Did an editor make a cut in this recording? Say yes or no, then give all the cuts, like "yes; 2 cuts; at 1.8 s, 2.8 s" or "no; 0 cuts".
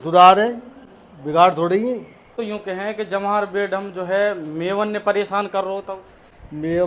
yes; 1 cut; at 2.3 s